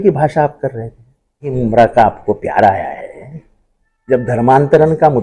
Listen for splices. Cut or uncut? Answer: cut